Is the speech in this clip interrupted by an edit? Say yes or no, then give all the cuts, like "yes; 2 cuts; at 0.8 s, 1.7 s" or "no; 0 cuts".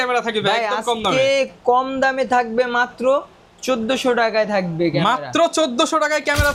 no; 0 cuts